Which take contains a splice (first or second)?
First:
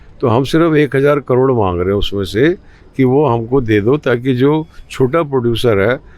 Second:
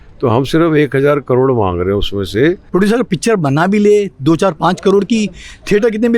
second